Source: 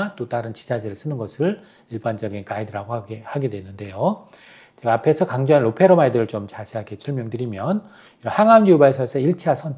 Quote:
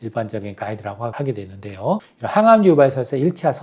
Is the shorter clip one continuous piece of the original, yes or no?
no